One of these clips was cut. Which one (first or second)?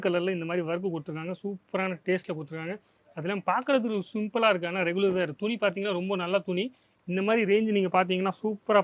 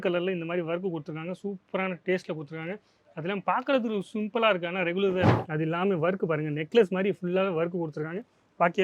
second